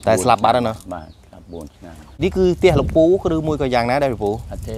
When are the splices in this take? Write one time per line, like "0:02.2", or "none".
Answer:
0:02.2

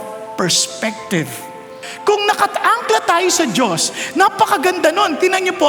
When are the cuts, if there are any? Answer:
0:01.9

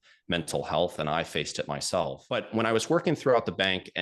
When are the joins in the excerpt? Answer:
0:02.2

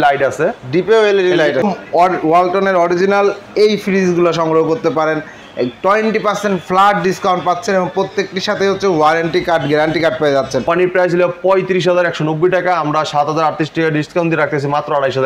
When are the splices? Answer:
0:01.6
0:10.6

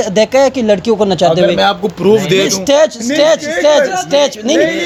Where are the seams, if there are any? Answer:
none

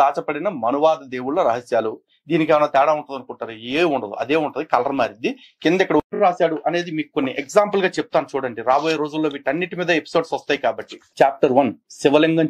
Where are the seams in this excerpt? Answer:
0:06.1

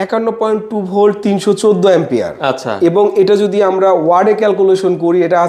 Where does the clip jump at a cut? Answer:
none

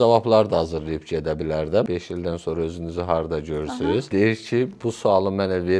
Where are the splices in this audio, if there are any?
0:01.9
0:04.6

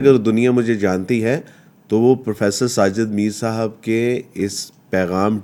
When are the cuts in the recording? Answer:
none

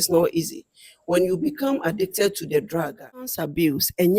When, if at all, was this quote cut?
0:03.2

